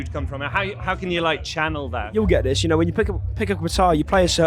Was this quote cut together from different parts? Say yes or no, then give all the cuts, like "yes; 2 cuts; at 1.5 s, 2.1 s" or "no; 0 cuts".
yes; 1 cut; at 2.1 s